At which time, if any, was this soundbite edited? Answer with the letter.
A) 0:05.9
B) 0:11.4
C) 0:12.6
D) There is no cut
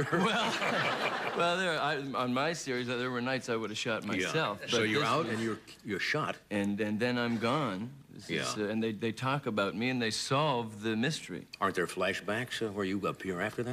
D